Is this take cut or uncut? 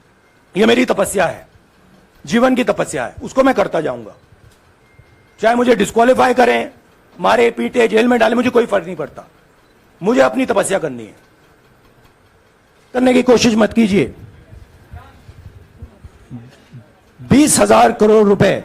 cut